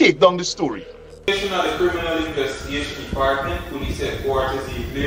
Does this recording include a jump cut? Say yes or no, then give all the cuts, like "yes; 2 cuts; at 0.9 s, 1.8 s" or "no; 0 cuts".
yes; 1 cut; at 1.3 s